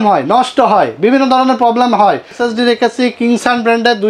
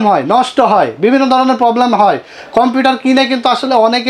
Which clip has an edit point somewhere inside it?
first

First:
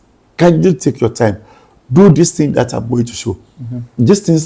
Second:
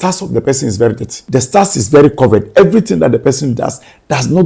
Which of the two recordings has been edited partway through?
second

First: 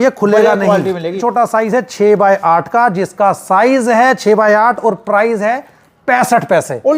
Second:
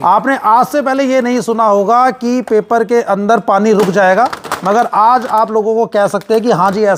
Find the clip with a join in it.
first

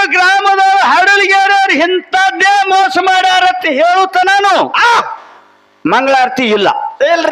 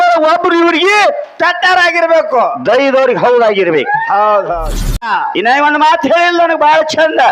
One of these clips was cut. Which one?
second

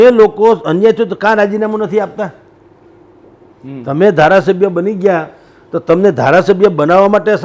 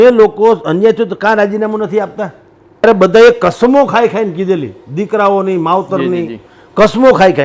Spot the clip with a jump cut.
second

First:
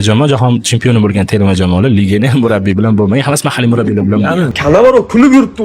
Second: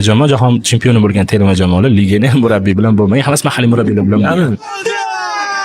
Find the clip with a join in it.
first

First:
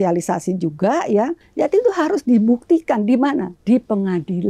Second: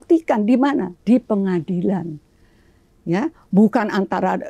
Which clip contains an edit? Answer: first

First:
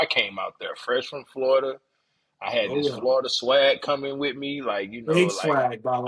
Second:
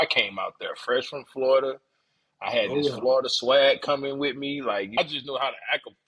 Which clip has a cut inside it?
second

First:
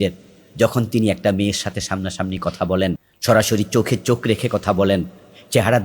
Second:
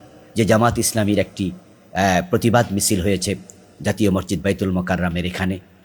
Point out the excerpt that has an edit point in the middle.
first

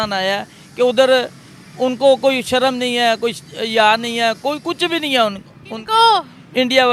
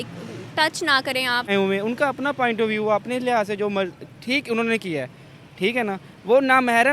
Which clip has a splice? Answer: second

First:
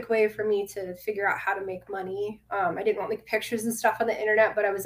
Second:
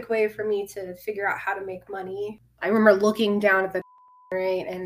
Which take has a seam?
second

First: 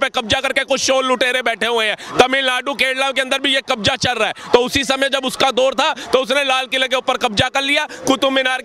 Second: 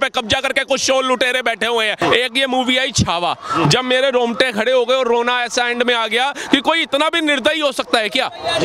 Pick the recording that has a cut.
second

